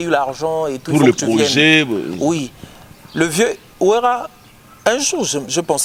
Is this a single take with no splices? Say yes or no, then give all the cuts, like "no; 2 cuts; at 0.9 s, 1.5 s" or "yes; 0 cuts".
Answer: yes; 0 cuts